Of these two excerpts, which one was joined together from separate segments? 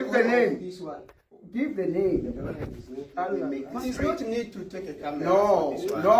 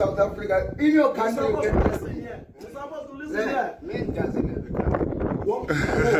first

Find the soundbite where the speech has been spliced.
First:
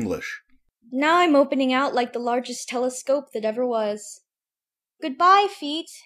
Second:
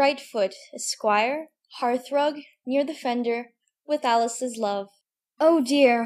first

